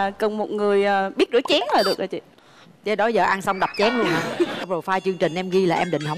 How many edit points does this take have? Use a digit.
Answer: 1